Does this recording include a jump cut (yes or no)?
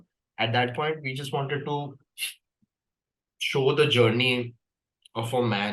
no